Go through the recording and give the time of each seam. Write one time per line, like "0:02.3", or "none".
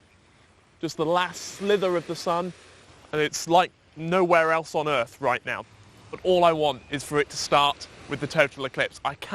0:05.8